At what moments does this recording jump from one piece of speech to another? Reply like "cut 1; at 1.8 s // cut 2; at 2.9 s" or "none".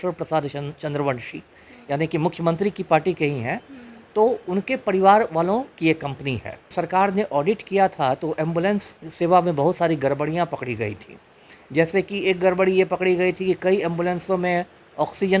cut 1; at 6.7 s